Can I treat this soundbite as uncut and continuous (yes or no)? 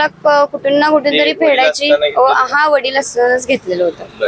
yes